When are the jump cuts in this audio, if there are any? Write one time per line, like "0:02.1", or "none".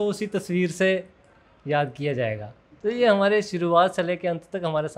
none